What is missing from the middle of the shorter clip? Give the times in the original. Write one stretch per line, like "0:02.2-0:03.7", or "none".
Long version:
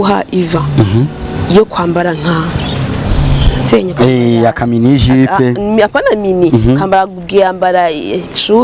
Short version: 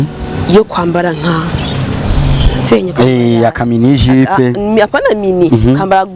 none